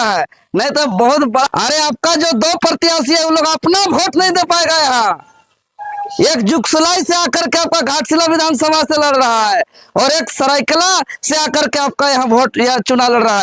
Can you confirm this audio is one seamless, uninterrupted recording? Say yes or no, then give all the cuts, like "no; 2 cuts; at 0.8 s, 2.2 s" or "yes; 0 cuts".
no; 1 cut; at 1.5 s